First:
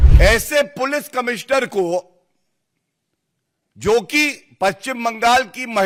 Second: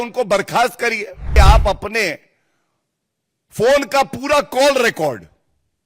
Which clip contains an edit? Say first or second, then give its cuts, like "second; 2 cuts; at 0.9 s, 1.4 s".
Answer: second; 1 cut; at 1.3 s